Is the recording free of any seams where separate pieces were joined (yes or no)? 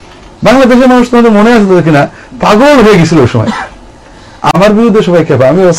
no